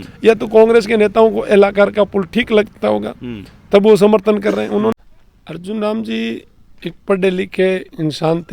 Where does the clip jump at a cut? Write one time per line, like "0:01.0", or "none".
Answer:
0:04.9